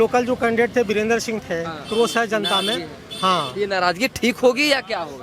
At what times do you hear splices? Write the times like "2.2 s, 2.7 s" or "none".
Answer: 1.9 s